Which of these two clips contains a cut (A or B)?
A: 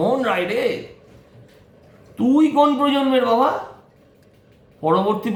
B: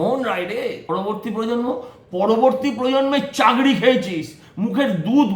B